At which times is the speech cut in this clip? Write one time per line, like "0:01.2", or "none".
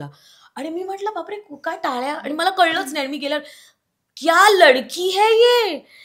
none